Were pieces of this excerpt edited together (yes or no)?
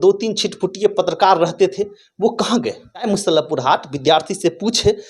yes